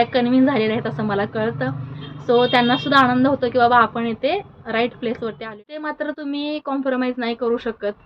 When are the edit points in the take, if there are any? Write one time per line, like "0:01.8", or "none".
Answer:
0:05.5